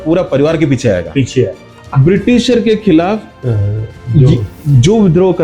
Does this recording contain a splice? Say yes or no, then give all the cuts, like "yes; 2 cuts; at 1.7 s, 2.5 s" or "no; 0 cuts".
yes; 1 cut; at 1.7 s